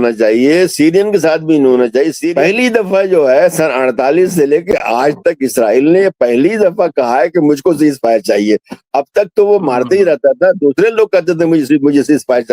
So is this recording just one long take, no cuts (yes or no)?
no